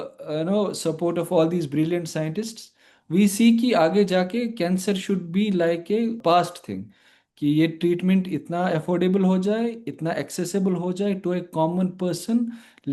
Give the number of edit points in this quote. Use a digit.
1